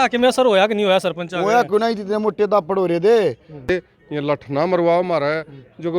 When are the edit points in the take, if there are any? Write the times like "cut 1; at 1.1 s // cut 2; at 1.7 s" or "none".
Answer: cut 1; at 3.7 s